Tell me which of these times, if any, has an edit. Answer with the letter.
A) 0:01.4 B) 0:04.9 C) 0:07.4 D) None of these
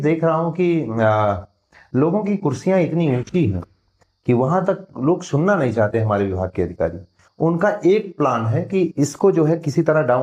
D